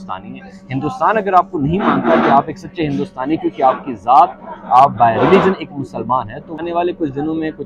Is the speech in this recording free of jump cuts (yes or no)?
no